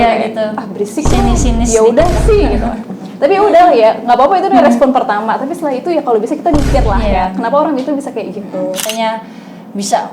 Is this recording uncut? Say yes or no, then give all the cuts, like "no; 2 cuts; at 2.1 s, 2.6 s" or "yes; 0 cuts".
no; 1 cut; at 8.9 s